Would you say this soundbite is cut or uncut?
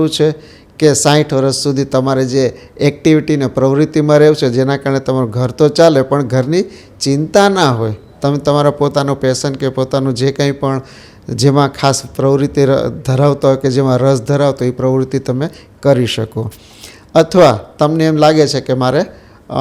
uncut